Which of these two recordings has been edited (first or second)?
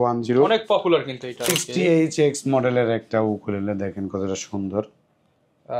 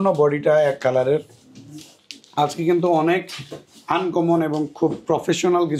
first